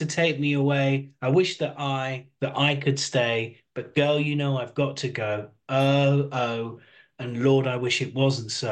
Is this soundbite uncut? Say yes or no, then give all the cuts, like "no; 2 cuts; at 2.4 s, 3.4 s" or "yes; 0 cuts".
yes; 0 cuts